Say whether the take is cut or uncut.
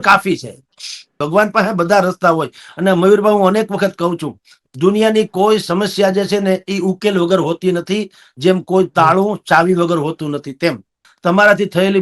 cut